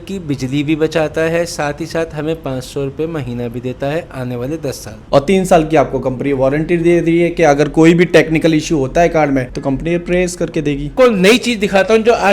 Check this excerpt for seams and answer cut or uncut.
cut